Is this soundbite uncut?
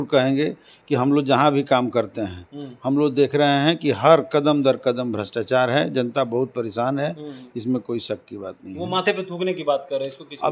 yes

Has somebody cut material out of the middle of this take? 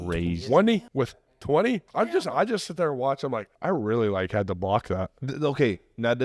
yes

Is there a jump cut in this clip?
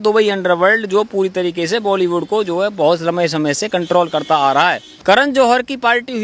yes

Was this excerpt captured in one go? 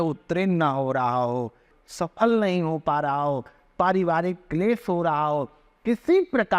no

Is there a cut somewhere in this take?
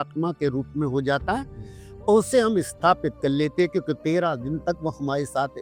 no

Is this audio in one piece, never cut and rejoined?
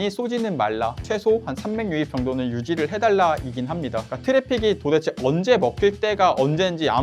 no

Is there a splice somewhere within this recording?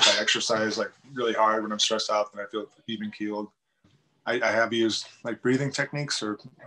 yes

